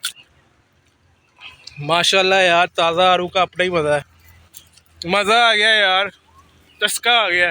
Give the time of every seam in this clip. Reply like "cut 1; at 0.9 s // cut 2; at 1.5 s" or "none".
none